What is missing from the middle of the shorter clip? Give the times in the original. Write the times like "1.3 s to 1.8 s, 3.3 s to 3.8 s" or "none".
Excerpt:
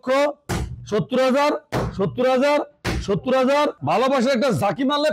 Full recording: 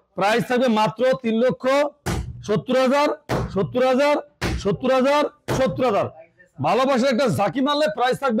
5.3 s to 6.5 s